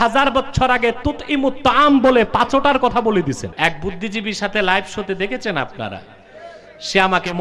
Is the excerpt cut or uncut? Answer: cut